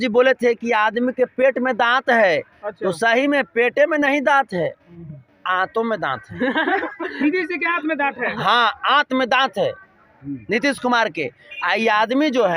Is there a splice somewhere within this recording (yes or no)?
no